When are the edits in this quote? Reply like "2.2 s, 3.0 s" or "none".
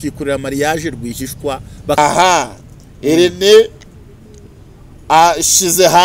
2.0 s